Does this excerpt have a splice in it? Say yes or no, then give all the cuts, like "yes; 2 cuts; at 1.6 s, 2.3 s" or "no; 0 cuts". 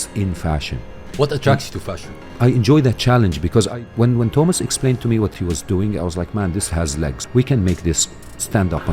yes; 4 cuts; at 1.1 s, 2.3 s, 5.3 s, 7.2 s